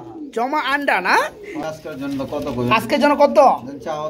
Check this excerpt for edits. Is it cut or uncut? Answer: cut